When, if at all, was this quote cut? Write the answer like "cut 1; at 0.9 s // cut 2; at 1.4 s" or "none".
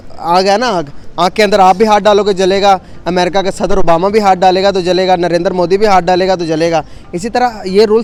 none